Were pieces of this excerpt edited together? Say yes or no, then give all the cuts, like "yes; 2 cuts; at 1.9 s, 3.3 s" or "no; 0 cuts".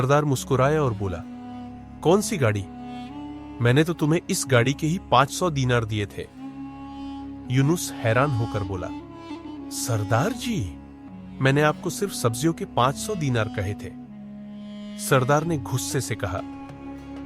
yes; 2 cuts; at 6.3 s, 7.5 s